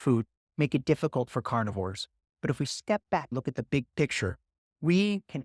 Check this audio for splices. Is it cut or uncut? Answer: cut